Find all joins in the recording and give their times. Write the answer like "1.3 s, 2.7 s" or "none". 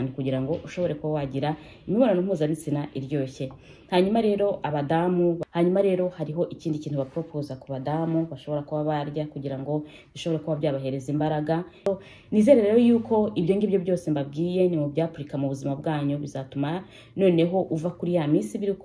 5.4 s, 11.9 s